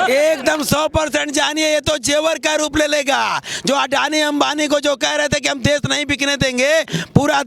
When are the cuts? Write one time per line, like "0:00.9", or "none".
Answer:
none